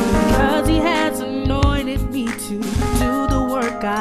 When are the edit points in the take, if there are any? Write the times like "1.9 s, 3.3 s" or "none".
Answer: 2.0 s